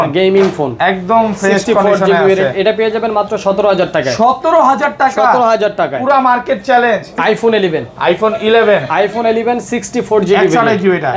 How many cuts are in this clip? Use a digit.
1